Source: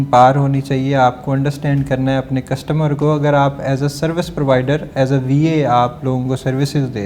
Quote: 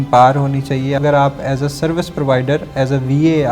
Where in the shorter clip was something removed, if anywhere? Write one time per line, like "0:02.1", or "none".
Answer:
0:01.0